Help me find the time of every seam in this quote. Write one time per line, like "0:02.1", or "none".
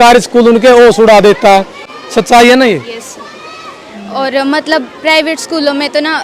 none